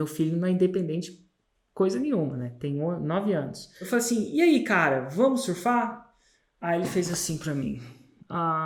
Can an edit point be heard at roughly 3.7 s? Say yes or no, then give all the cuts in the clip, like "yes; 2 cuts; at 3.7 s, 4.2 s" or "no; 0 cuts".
yes; 1 cut; at 3.7 s